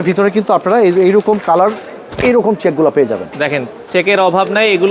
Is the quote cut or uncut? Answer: uncut